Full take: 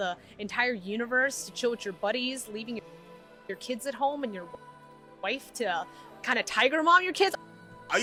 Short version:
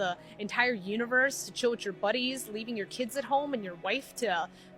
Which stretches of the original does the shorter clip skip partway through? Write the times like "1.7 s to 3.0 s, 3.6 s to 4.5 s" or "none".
2.9 s to 3.6 s, 4.4 s to 5.1 s